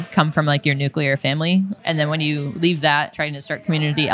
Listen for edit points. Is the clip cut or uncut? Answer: cut